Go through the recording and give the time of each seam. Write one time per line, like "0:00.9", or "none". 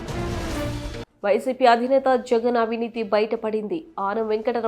0:00.9